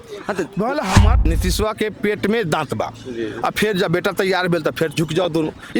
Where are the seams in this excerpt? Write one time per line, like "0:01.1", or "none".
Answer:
0:01.2